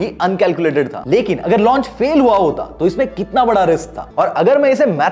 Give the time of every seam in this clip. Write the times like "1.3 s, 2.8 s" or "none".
1.0 s, 4.0 s